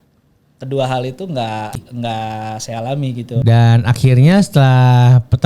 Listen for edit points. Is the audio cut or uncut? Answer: cut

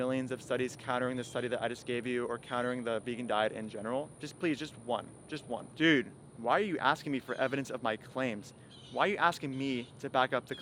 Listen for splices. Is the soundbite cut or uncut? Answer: uncut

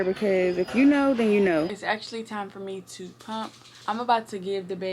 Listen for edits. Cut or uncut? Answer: cut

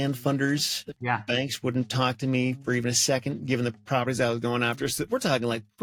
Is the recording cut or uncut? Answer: uncut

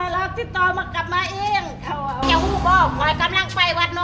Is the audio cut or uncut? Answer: cut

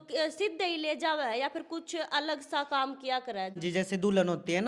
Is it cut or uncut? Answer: cut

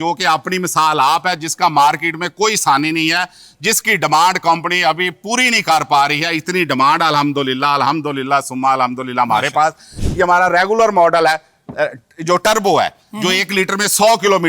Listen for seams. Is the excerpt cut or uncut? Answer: cut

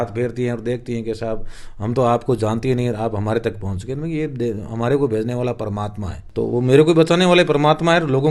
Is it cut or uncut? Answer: cut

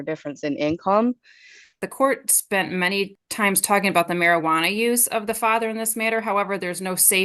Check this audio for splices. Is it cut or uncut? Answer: cut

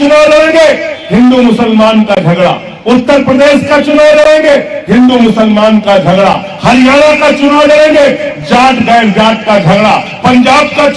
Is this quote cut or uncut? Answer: uncut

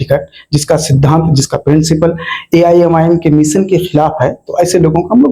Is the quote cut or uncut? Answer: uncut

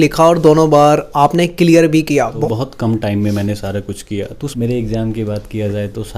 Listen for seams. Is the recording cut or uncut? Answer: cut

